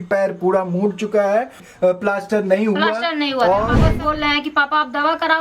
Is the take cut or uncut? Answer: cut